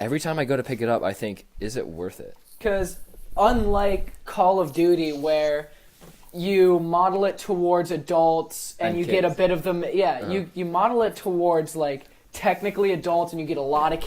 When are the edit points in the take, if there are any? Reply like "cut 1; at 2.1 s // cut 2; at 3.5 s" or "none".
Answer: cut 1; at 2.5 s